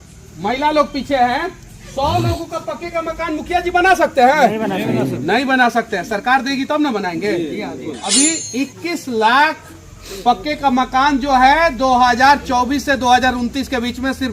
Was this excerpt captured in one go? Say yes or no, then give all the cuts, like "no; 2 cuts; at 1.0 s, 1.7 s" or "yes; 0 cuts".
no; 1 cut; at 8.0 s